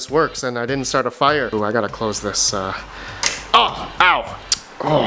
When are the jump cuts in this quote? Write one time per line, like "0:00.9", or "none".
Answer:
0:01.5